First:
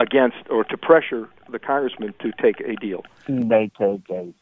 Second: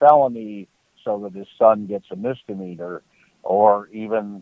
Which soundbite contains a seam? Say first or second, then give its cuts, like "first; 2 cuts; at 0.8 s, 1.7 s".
first; 1 cut; at 3.1 s